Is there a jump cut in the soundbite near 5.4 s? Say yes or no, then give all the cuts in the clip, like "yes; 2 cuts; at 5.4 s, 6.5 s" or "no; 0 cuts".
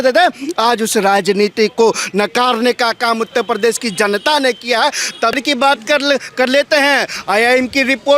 yes; 1 cut; at 5.4 s